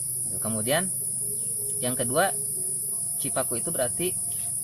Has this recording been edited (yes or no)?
no